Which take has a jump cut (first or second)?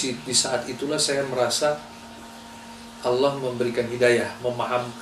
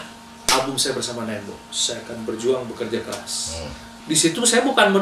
second